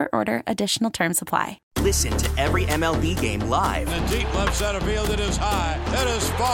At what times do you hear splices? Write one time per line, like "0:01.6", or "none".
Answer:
0:01.6